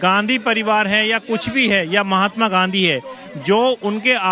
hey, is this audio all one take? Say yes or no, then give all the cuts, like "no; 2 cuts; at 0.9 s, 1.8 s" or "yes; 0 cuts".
yes; 0 cuts